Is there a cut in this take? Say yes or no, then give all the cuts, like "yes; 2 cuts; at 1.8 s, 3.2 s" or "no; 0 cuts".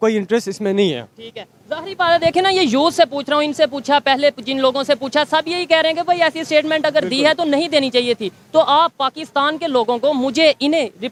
no; 0 cuts